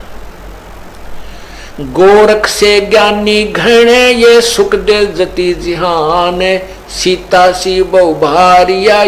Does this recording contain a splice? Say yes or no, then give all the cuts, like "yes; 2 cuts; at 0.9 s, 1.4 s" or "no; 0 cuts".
no; 0 cuts